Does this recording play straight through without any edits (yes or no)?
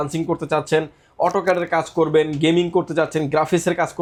yes